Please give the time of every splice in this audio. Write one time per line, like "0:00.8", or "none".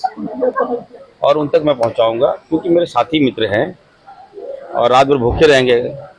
none